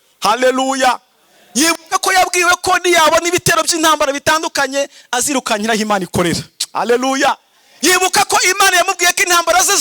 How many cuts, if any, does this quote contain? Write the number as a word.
zero